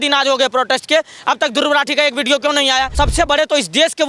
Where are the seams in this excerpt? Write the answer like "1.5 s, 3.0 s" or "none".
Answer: 2.9 s

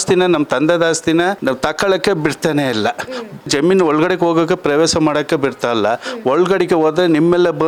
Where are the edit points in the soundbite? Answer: none

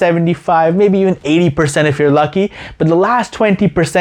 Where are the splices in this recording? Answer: none

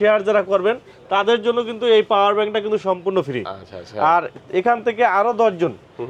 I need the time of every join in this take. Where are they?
none

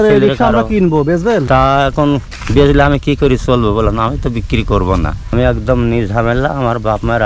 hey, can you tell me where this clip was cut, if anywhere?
1.5 s, 5.3 s

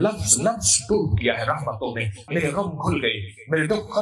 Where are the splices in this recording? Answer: 2.2 s

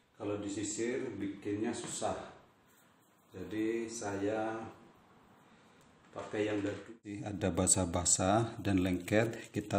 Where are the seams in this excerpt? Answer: 7.3 s

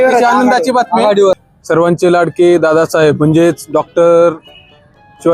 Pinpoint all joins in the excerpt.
1.5 s

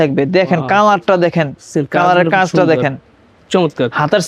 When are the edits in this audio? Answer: none

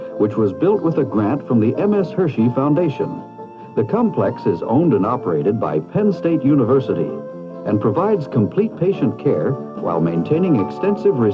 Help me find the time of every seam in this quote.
2.5 s

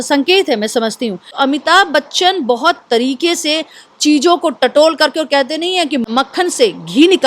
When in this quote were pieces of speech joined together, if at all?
1.3 s, 6.0 s

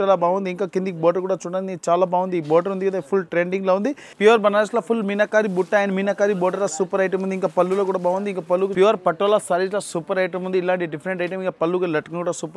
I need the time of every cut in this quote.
4.1 s, 8.7 s

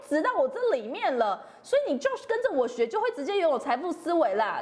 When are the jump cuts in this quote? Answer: none

